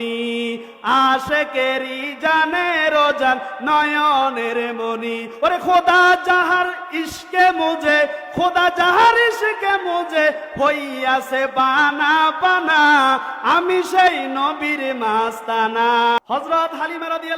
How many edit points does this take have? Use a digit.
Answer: 1